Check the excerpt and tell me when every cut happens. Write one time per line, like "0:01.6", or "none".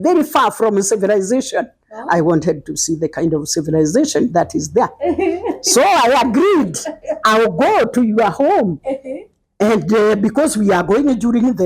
none